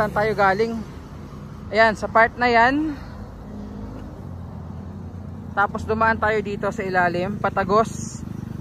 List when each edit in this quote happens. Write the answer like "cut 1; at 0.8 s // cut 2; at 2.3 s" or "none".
none